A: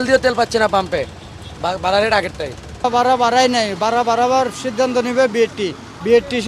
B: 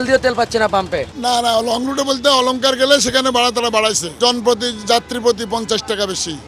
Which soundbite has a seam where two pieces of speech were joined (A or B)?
B